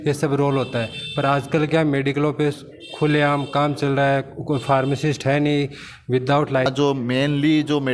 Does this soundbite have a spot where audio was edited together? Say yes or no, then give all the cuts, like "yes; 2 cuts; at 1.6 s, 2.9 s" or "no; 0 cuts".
yes; 1 cut; at 6.7 s